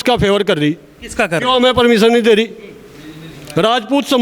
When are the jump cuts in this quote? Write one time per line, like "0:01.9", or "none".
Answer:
none